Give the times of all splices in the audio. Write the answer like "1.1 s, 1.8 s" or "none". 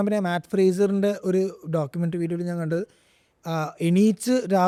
none